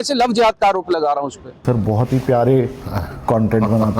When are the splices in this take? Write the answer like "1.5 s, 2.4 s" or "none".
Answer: 1.5 s